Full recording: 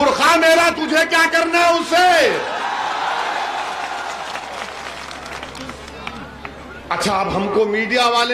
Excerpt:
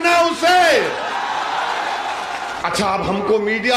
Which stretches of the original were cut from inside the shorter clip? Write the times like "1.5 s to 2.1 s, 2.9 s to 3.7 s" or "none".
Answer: 4.1 s to 6.8 s